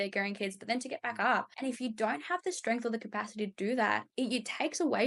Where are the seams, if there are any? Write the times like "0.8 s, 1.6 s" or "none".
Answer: 1.5 s, 4.0 s